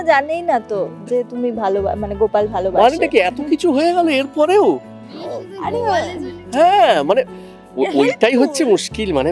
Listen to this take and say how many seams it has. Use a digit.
0